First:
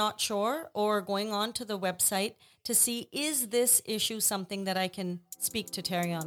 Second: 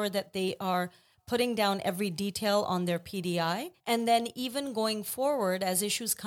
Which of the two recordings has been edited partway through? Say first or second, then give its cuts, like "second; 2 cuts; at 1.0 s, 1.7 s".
second; 1 cut; at 3.7 s